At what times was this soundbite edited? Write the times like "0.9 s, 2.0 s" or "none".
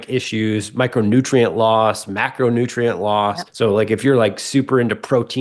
3.4 s

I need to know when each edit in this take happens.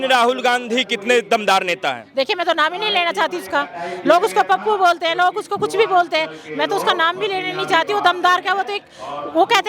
none

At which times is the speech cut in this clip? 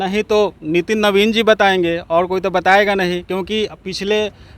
none

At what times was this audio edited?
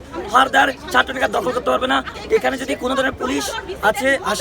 2.1 s

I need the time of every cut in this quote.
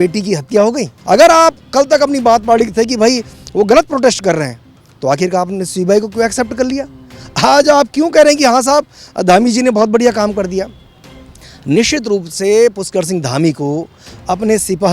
0.9 s

